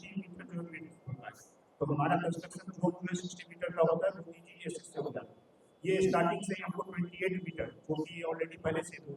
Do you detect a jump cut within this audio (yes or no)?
no